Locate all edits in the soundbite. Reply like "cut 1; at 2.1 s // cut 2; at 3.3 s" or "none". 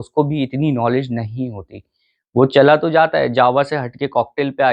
none